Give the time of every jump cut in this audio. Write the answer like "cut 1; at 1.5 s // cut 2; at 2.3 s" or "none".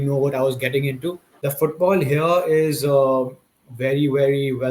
cut 1; at 1.3 s